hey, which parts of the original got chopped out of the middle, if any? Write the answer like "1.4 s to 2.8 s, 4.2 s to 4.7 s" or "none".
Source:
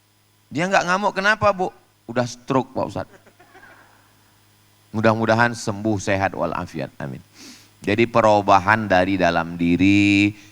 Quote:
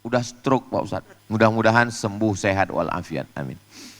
3.2 s to 4.8 s